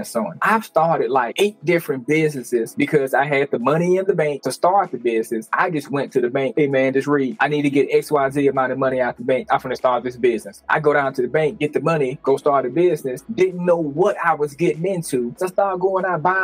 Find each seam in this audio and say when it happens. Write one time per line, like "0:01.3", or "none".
0:02.7
0:10.6
0:15.4